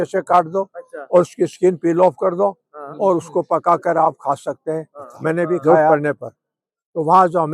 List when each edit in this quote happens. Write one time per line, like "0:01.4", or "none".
0:05.9